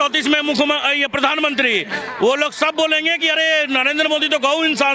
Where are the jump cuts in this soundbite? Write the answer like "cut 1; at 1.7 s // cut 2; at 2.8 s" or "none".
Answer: none